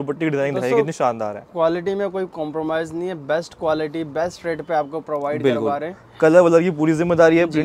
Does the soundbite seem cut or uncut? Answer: uncut